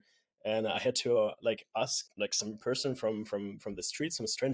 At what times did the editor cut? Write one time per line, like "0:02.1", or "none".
0:02.0